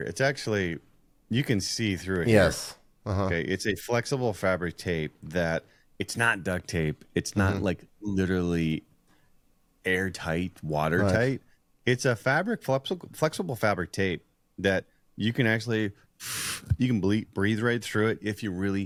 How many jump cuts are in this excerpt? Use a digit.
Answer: 0